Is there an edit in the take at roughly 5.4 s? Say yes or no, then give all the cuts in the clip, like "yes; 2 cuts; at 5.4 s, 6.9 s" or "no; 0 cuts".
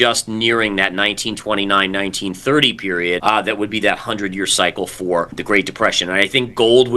yes; 2 cuts; at 3.2 s, 5.4 s